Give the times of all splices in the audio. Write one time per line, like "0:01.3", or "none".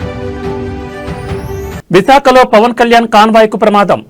0:01.8